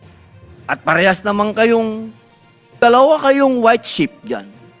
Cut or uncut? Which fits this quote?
cut